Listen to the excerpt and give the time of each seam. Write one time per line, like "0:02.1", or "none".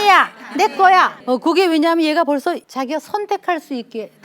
0:01.2
0:02.7